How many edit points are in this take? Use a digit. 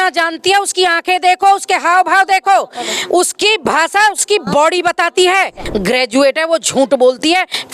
1